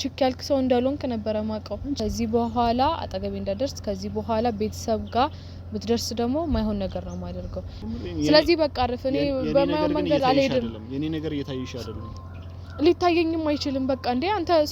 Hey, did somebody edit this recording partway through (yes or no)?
yes